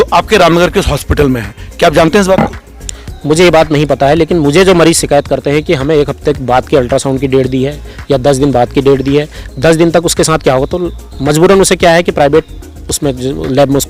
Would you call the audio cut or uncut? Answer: uncut